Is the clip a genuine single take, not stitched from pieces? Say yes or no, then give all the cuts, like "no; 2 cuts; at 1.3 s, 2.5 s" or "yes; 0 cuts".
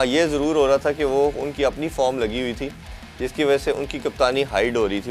yes; 0 cuts